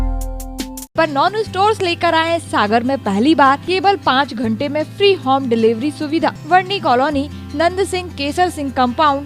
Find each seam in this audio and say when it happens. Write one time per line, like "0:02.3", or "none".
0:00.9
0:03.6
0:06.4